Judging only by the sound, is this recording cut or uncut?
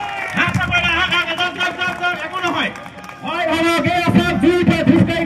uncut